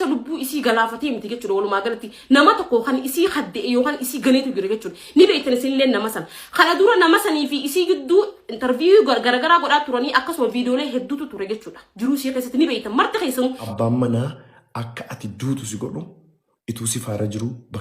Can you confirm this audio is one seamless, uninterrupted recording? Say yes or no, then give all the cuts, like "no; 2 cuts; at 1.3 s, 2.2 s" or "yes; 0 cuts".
no; 1 cut; at 13.5 s